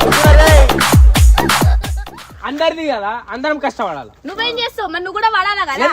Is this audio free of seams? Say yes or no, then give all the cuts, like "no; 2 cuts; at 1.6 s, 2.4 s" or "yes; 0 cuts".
no; 1 cut; at 2.1 s